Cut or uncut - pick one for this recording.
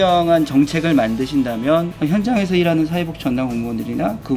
cut